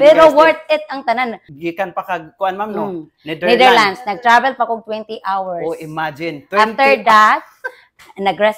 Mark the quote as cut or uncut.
cut